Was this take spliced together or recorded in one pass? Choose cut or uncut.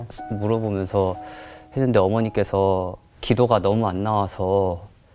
cut